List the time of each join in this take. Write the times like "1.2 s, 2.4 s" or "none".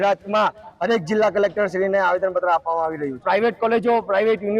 3.2 s